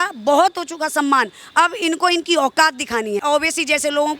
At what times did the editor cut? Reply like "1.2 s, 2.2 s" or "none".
3.2 s